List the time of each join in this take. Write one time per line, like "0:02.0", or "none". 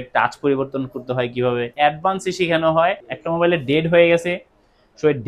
0:01.7
0:03.1